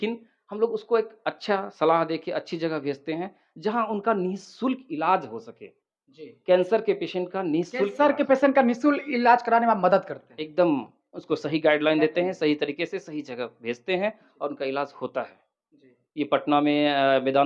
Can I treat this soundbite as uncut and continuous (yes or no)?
yes